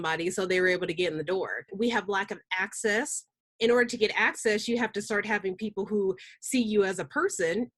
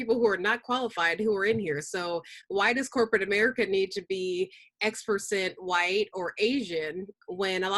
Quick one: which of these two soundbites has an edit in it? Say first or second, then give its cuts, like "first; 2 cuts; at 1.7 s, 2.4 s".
first; 1 cut; at 1.7 s